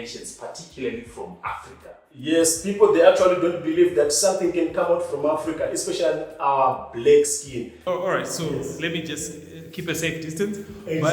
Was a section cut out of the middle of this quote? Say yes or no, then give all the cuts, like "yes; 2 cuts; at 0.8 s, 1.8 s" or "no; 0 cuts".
yes; 1 cut; at 7.7 s